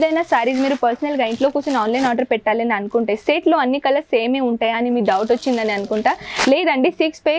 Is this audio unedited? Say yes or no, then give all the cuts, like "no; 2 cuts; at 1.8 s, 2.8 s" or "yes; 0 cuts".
yes; 0 cuts